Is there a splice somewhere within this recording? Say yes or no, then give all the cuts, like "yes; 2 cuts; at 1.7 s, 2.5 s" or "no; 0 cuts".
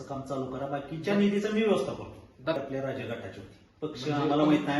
yes; 1 cut; at 2.6 s